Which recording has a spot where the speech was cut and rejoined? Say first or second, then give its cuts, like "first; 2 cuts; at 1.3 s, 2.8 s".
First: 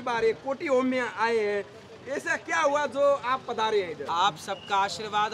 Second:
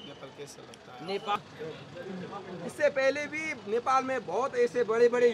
second; 1 cut; at 1.4 s